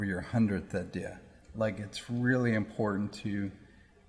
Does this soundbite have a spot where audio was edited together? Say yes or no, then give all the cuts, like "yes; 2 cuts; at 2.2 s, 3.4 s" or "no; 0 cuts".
no; 0 cuts